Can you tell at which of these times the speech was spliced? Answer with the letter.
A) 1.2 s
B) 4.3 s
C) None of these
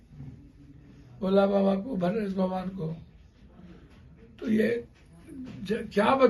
C